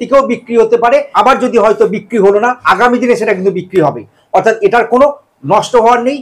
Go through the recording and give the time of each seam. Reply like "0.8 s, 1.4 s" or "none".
1.1 s, 2.6 s